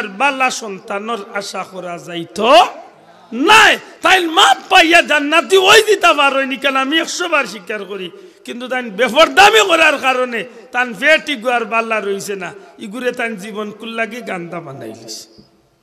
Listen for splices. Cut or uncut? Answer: uncut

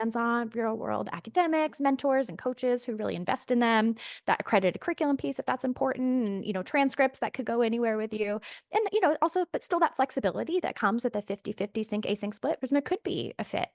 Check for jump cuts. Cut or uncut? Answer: cut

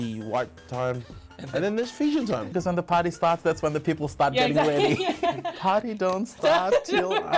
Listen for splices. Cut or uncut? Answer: cut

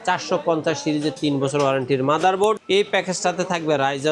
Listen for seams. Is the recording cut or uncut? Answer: cut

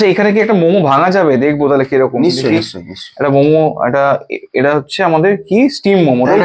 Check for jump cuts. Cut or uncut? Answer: uncut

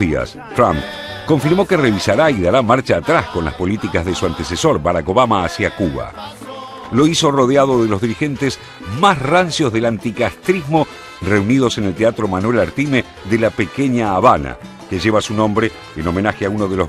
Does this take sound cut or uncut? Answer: cut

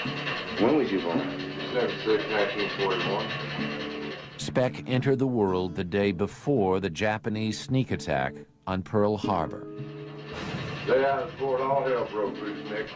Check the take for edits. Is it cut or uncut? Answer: uncut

